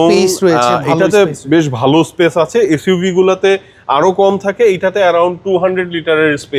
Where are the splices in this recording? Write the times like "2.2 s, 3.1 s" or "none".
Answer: none